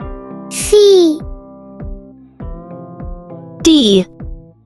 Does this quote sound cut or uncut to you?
uncut